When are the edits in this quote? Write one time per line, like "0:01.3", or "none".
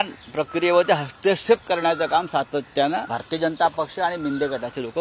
0:03.1